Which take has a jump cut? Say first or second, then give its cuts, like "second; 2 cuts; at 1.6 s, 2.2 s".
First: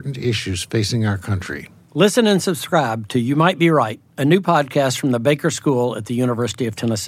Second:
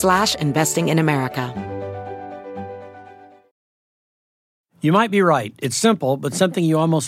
second; 1 cut; at 1.5 s